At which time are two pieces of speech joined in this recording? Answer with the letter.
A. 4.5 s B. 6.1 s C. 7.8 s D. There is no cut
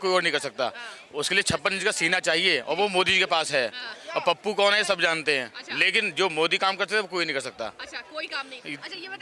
D